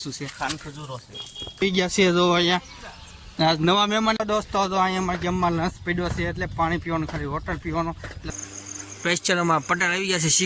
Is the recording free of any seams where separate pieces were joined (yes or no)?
no